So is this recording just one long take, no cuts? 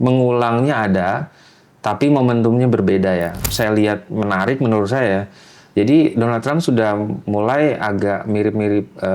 no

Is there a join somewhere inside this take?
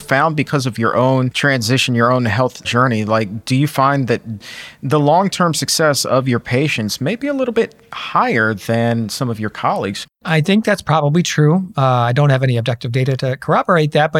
yes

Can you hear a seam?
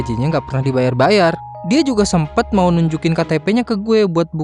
yes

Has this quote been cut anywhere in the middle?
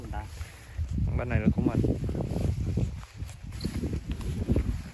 no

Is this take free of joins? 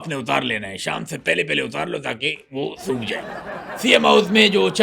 no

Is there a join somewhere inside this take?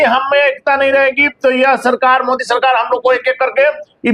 no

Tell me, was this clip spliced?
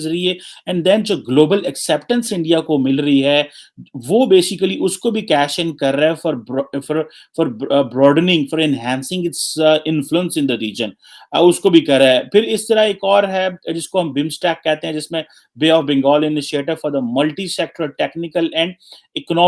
no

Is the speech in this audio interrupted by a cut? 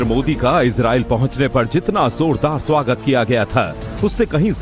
yes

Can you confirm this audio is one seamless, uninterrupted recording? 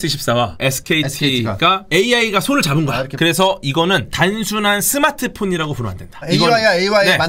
no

